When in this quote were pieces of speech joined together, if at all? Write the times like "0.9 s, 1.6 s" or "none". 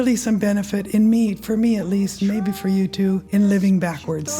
3.2 s

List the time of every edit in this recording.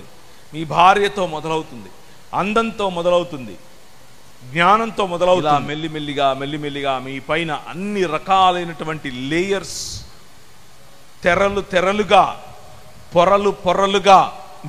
5.4 s

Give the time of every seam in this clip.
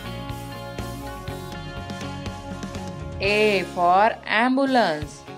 1.0 s

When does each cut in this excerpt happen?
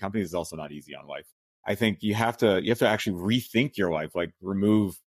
1.1 s

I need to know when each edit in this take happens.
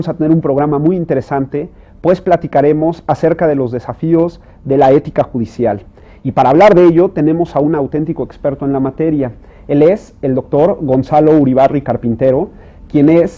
none

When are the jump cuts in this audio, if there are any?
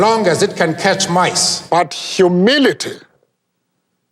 1.5 s

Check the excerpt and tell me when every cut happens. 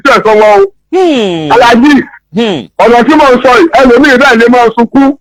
none

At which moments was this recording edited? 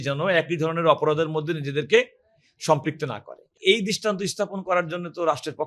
3.5 s

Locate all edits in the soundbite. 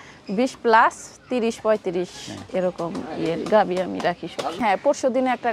4.6 s

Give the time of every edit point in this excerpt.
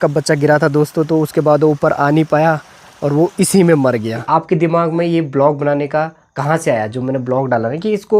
4.2 s

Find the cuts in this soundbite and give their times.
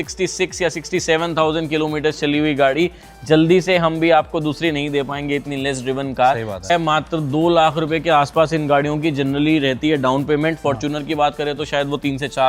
6.7 s

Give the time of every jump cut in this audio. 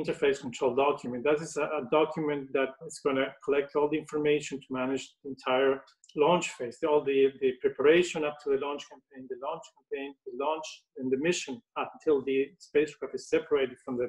2.9 s, 6.0 s

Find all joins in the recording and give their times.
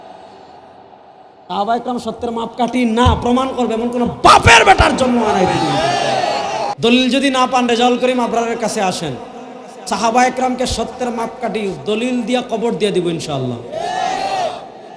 6.7 s

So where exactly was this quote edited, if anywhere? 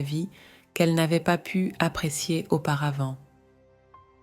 3.2 s

